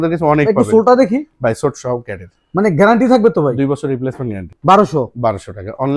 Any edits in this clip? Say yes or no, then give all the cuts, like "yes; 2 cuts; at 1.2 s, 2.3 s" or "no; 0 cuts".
yes; 1 cut; at 4.5 s